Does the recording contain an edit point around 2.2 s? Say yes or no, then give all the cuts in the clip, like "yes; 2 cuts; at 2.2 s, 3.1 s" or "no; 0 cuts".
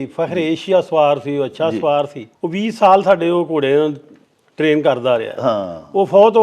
yes; 1 cut; at 2.2 s